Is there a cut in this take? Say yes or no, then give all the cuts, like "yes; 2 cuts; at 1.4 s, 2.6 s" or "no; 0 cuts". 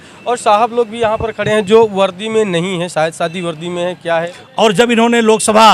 yes; 1 cut; at 4.4 s